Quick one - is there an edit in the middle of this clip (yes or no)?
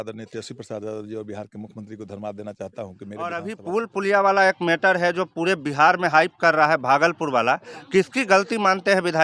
yes